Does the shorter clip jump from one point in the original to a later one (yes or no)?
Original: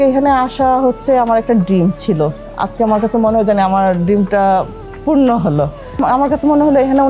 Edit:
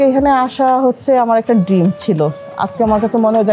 no